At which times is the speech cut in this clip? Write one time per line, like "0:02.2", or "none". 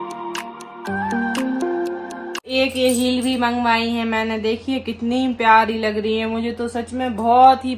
0:02.5